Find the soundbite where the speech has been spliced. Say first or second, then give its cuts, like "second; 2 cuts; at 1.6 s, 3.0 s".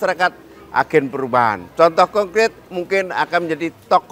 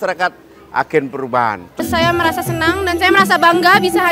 second; 1 cut; at 1.8 s